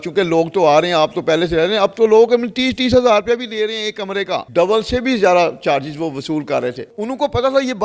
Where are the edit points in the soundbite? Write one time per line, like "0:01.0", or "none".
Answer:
0:04.5
0:06.9